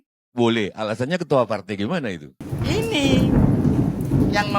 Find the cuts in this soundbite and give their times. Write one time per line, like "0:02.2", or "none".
0:02.5

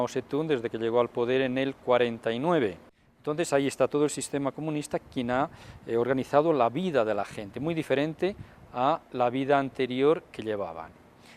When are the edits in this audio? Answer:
0:06.4

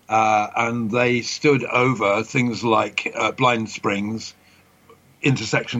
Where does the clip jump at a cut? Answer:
0:04.5

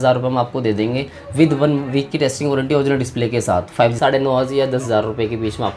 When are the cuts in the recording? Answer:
0:04.0

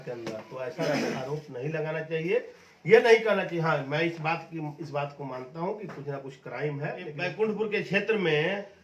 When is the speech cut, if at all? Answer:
0:07.2

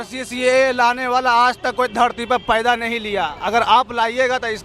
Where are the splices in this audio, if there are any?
none

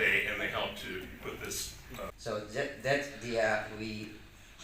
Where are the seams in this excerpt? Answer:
0:02.1

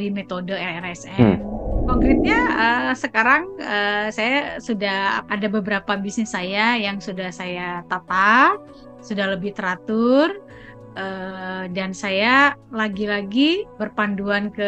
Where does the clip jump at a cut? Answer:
0:01.8
0:05.2
0:12.6
0:13.7

